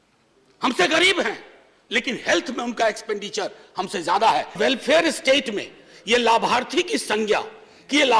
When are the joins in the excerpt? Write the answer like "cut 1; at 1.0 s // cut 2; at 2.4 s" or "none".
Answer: cut 1; at 4.6 s